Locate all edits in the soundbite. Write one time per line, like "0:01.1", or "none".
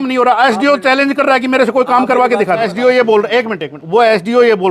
0:02.6